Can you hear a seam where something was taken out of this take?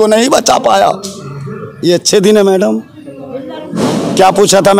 no; 0 cuts

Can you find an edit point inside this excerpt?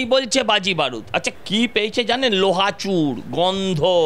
yes; 1 cut; at 1.3 s

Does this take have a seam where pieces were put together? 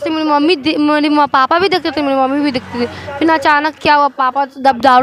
no; 0 cuts

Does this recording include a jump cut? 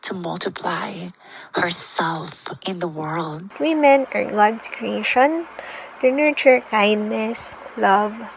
yes; 2 cuts; at 2.4 s, 3.5 s

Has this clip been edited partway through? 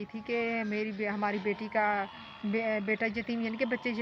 no; 0 cuts

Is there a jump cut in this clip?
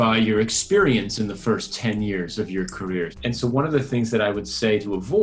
yes; 1 cut; at 3.1 s

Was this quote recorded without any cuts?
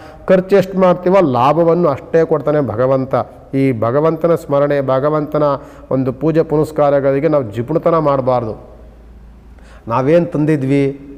yes; 0 cuts

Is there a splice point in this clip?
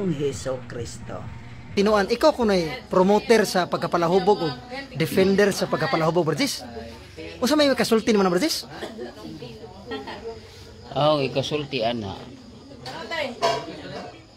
yes; 1 cut; at 1.7 s

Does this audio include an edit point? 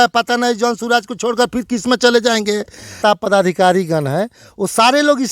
yes; 1 cut; at 3.0 s

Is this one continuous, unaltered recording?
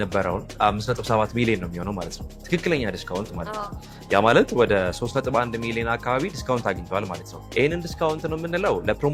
yes; 0 cuts

